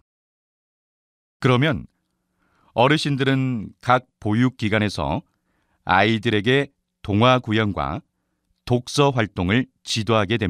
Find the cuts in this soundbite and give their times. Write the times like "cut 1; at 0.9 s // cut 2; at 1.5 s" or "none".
none